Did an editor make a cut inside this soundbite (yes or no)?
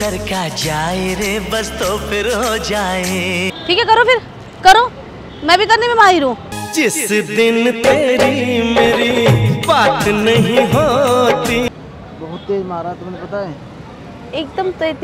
yes